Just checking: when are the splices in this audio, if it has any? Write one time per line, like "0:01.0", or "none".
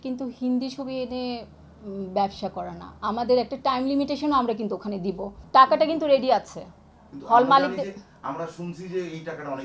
0:05.3